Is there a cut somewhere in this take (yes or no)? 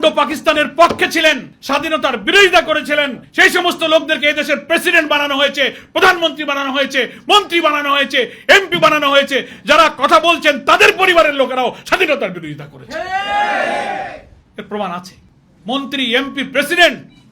no